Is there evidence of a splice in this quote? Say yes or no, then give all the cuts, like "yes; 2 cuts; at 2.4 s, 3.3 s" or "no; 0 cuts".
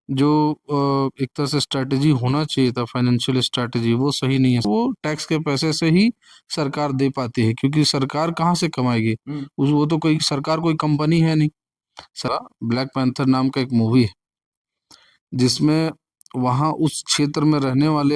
yes; 2 cuts; at 4.7 s, 12.3 s